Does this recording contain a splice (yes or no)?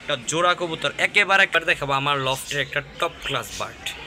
yes